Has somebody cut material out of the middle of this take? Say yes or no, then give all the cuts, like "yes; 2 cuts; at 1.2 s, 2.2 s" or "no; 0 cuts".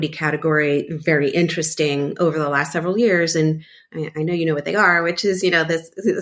no; 0 cuts